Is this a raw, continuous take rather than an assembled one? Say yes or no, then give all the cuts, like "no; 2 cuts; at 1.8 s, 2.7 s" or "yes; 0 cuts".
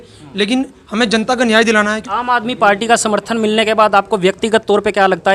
no; 1 cut; at 2.0 s